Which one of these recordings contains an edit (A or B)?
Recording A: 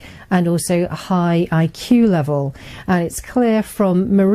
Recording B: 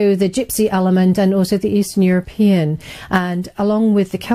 A